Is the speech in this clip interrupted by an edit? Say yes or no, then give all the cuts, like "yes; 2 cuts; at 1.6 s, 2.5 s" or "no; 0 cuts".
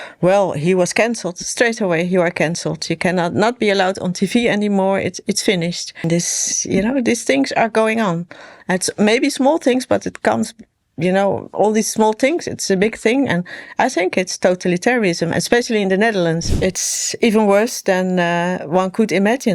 yes; 2 cuts; at 6.1 s, 16.5 s